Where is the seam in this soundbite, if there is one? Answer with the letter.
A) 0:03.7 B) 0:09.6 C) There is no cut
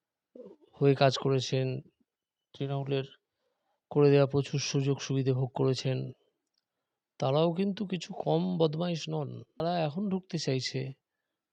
B